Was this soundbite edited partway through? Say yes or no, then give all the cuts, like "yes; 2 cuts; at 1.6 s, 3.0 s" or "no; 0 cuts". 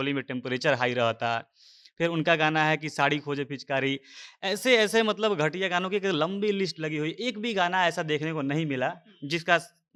no; 0 cuts